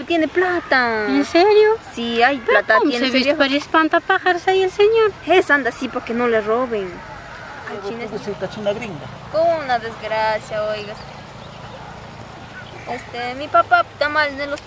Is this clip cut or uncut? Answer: cut